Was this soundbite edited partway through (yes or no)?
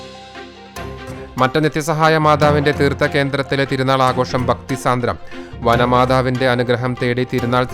no